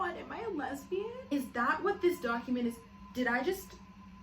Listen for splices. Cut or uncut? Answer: cut